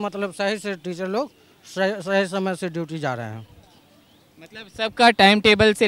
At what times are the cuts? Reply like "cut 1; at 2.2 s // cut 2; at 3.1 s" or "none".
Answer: none